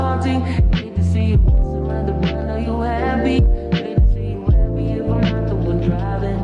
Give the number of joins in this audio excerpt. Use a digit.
0